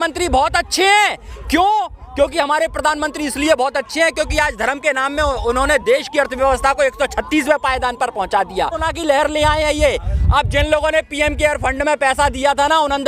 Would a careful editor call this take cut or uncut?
cut